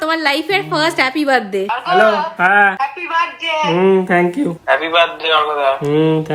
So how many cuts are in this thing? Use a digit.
2